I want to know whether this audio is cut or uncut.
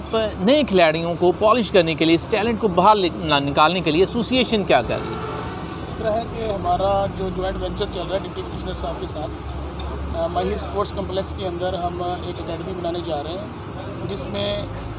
uncut